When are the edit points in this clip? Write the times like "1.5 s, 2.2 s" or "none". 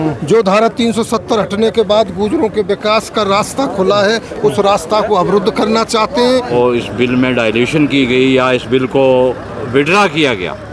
6.5 s